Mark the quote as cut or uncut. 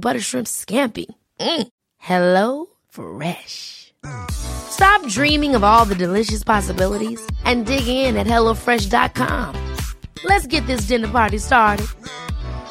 uncut